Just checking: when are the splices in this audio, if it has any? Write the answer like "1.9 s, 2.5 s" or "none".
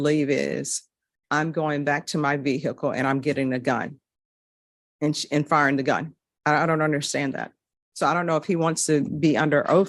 none